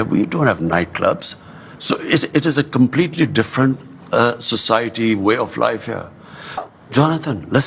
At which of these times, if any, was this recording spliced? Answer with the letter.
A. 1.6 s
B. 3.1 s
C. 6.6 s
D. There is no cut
C